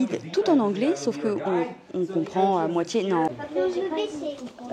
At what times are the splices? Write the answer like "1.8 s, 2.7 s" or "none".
3.3 s

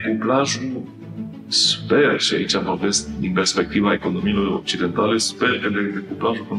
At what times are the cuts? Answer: none

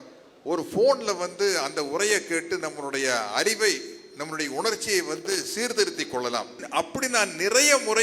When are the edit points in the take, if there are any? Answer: 6.6 s

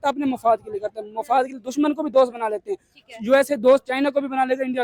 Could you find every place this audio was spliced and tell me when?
none

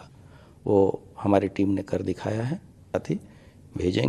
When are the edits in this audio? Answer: 2.9 s

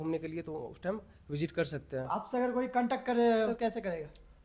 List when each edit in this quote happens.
2.1 s, 3.5 s

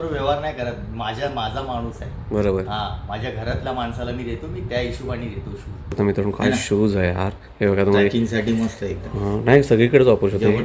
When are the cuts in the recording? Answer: 6.0 s

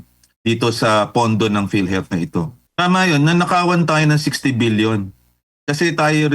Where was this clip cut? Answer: 2.6 s

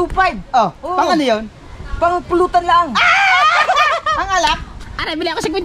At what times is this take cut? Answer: none

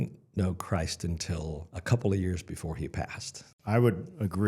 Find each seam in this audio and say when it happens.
1.7 s, 3.5 s

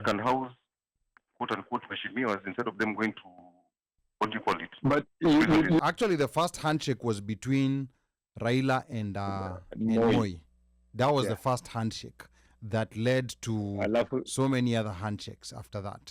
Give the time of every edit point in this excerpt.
5.8 s

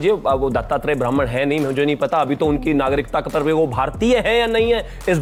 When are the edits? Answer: none

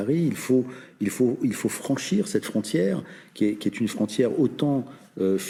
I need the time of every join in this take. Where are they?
none

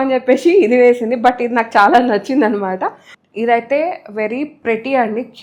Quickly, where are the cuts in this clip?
3.1 s

